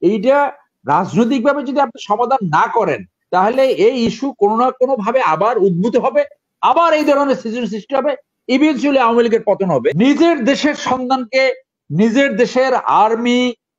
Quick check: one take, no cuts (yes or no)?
no